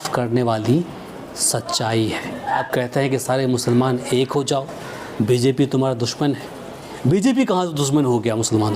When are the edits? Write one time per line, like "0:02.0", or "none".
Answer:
0:02.7